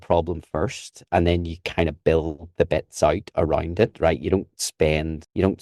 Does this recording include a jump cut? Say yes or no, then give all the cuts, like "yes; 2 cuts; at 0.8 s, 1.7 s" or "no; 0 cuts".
no; 0 cuts